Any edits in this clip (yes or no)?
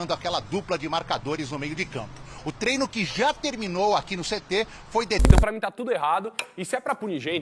yes